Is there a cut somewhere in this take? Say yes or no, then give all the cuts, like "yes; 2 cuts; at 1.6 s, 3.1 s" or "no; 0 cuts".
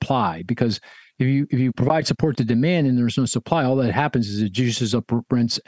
no; 0 cuts